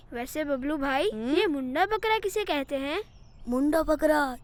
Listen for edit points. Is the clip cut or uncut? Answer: uncut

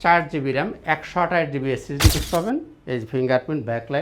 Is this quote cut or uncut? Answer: cut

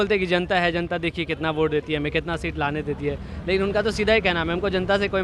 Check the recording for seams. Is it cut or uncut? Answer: uncut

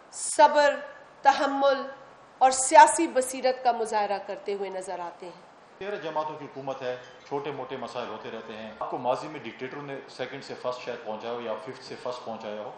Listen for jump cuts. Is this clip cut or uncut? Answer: cut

